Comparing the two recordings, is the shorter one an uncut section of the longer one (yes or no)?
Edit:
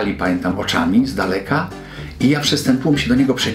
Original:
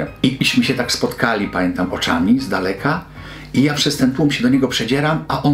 yes